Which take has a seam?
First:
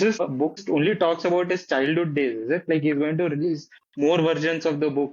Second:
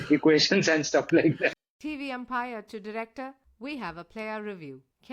second; 1 cut; at 1.5 s

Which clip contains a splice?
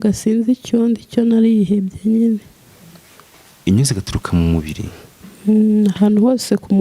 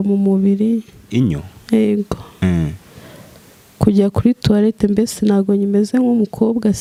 first; 1 cut; at 2.5 s

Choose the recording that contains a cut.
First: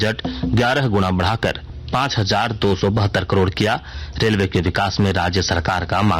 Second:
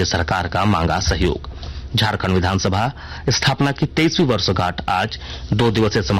first; 1 cut; at 1.7 s

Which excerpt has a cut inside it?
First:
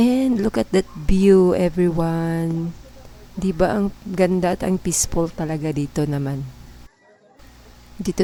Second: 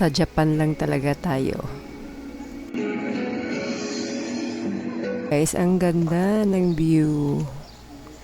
second; 1 cut; at 5.3 s

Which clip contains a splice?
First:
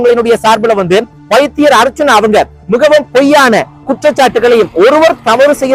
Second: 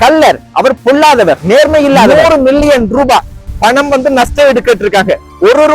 second; 1 cut; at 2.1 s

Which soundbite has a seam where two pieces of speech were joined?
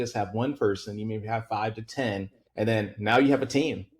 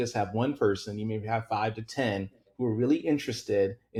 first; 1 cut; at 2.4 s

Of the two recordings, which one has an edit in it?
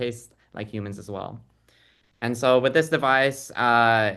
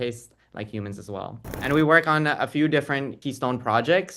second; 2 cuts; at 1.6 s, 3.1 s

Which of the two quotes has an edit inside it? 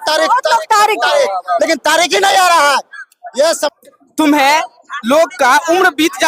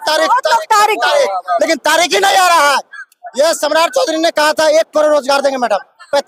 first; 1 cut; at 3.7 s

